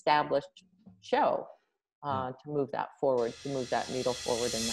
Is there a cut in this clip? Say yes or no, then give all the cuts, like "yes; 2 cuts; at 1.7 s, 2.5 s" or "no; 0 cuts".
no; 0 cuts